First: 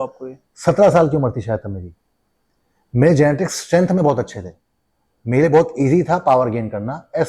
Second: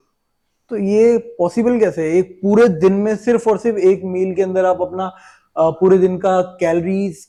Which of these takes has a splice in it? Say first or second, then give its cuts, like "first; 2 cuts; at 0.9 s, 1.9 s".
first; 1 cut; at 2.2 s